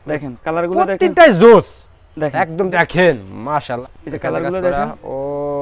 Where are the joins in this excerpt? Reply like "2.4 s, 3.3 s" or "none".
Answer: 2.7 s, 3.8 s